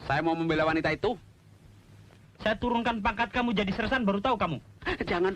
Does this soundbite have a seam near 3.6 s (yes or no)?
no